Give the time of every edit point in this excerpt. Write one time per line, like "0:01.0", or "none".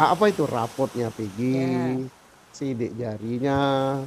none

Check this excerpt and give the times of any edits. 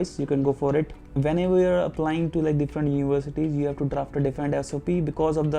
0:01.0

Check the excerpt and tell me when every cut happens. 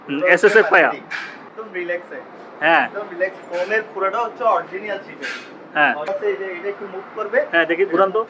0:01.6
0:06.1

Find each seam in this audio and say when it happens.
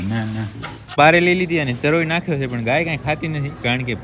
0:00.9

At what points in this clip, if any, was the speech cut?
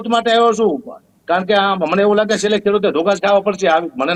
none

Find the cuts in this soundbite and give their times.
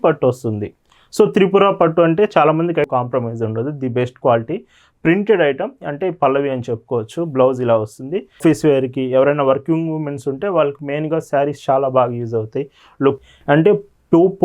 0:02.8
0:08.4
0:13.2

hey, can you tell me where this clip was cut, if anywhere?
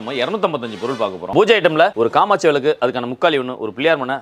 0:01.3

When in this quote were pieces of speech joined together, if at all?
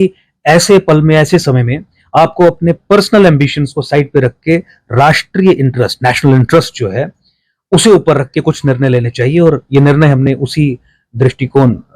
none

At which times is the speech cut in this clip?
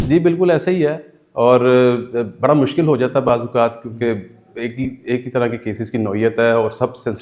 none

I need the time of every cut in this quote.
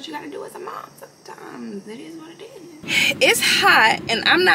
0:02.8

